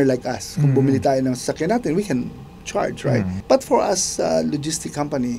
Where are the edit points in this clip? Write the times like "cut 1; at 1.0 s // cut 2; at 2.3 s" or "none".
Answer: cut 1; at 3.4 s